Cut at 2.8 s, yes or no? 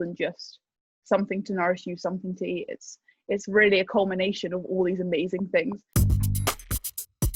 no